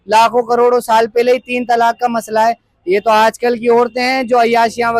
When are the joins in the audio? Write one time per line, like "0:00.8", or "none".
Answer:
none